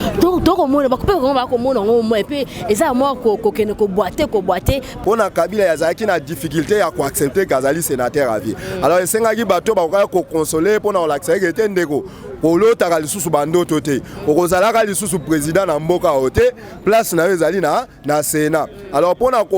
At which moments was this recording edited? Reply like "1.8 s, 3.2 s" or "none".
4.9 s